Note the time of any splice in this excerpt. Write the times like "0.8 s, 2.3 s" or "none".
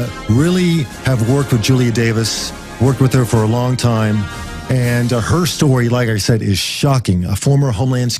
3.2 s